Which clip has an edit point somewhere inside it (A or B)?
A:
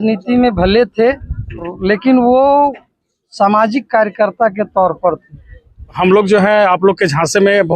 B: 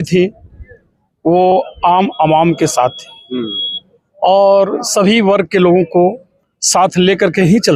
A